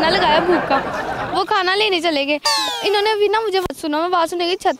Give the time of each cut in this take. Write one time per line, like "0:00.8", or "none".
none